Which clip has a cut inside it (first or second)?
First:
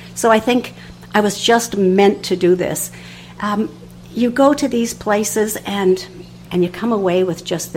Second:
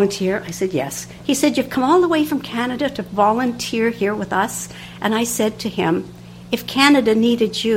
first